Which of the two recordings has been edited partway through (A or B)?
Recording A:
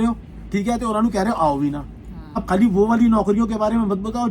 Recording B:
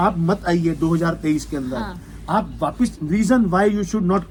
A